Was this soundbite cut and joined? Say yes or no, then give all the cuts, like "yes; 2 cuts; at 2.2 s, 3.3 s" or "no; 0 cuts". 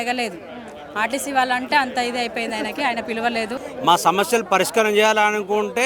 yes; 1 cut; at 3.6 s